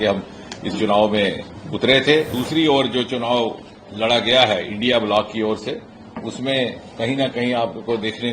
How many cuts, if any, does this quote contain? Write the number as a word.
one